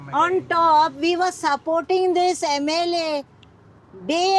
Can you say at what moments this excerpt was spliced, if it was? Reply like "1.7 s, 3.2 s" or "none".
none

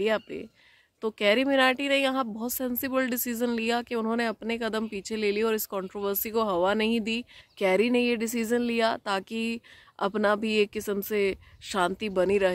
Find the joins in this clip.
7.4 s

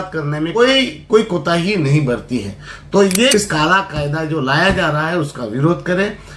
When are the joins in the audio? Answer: 3.3 s

